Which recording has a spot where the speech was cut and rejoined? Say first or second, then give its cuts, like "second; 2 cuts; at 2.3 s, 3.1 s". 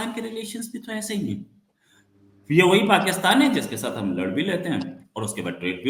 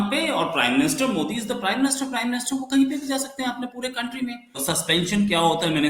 second; 1 cut; at 4.6 s